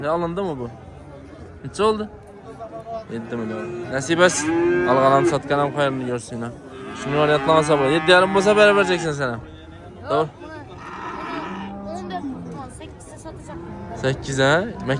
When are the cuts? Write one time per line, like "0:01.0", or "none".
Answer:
none